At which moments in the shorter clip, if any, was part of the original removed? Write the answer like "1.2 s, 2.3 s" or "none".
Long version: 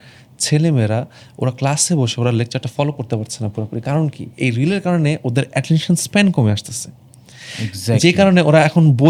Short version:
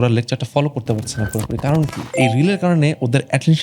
none